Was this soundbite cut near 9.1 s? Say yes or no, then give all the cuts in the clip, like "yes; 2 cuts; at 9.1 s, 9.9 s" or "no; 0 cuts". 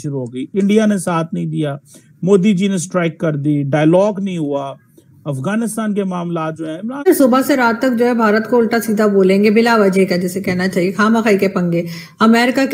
no; 1 cut; at 6.9 s